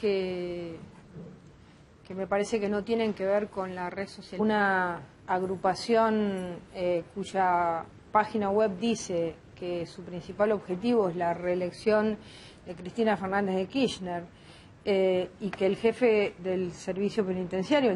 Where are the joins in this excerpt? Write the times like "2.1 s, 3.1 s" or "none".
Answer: none